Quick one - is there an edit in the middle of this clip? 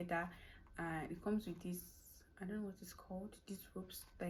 no; 0 cuts

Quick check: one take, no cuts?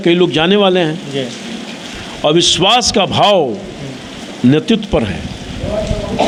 yes; 0 cuts

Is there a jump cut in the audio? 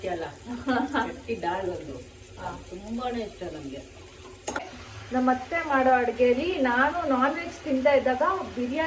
yes; 1 cut; at 4.7 s

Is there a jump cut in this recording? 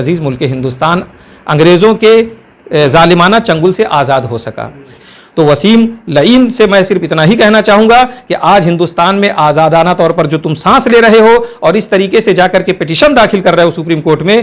yes; 1 cut; at 5.0 s

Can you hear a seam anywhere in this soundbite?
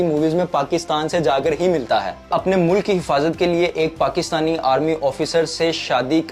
yes; 1 cut; at 2.3 s

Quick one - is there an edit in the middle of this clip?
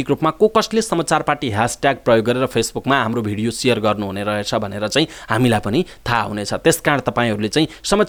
no; 0 cuts

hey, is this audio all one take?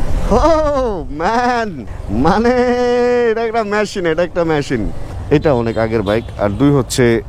no; 1 cut; at 5.1 s

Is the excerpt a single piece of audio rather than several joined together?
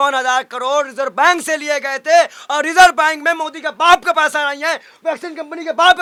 yes; 0 cuts

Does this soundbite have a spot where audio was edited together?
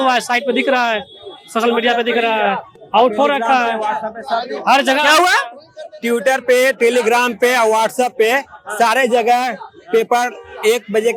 no; 0 cuts

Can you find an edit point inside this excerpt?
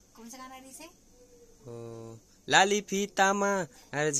no; 0 cuts

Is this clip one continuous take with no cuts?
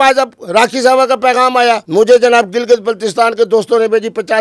no; 1 cut; at 1.8 s

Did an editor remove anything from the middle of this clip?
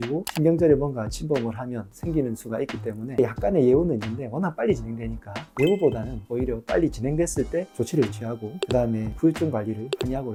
no; 0 cuts

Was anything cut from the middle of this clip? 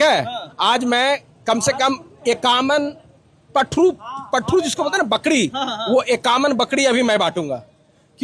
no; 0 cuts

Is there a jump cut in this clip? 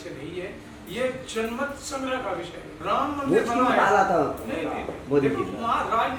no; 0 cuts

